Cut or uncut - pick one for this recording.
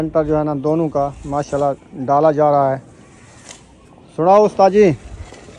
uncut